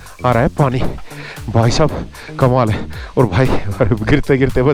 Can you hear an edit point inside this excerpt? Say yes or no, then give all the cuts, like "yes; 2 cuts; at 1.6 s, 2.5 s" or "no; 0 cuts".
no; 0 cuts